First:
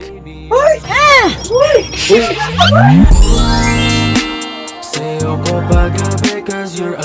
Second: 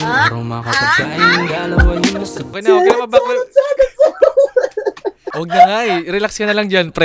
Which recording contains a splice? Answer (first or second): second